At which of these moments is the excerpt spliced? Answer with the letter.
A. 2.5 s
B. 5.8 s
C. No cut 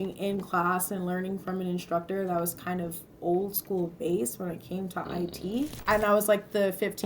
B